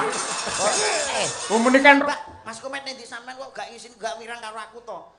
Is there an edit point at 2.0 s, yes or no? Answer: yes